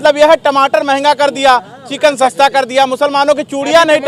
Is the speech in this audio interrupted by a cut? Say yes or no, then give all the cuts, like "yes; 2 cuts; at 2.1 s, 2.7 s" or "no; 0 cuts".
no; 0 cuts